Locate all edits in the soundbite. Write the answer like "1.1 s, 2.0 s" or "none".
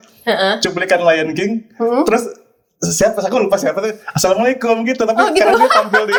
none